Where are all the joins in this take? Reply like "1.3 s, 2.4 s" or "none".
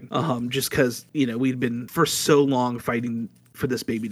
1.0 s, 1.9 s